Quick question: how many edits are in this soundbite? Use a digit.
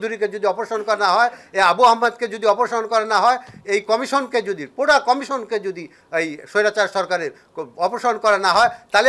0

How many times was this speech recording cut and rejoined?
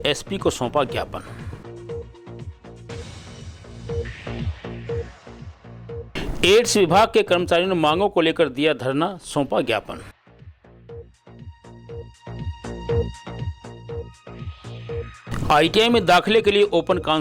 1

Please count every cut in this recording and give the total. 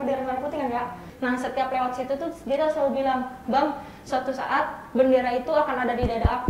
1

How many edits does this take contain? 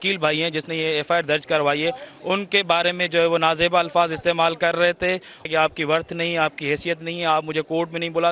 1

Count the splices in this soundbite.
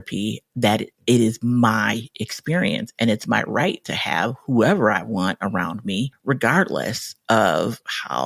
1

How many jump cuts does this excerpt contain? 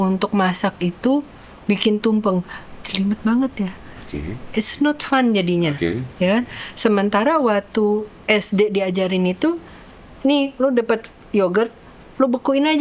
0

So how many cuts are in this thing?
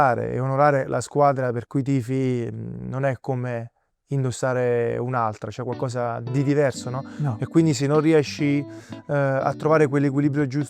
0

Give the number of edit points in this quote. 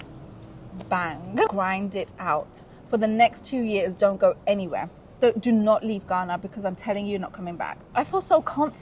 2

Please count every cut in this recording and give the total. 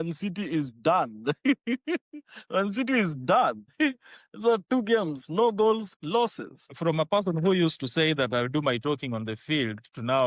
2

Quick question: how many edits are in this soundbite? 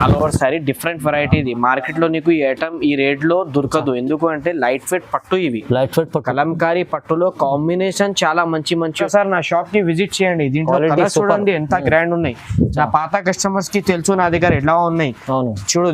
1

